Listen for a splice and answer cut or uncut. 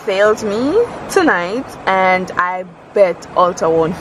uncut